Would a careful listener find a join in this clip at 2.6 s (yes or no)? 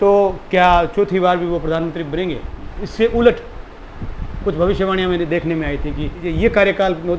yes